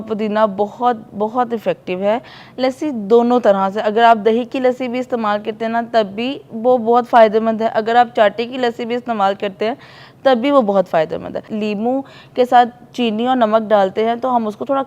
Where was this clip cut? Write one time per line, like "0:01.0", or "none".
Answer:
0:02.4
0:11.5